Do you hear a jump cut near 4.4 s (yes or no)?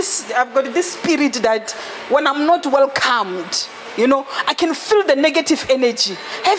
no